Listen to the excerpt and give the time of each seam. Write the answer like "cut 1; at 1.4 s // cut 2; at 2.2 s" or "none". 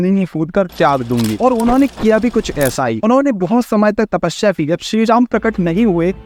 none